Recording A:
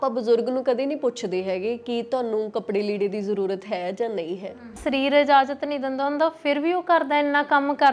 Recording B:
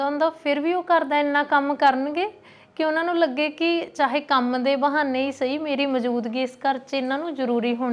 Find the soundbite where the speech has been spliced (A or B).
A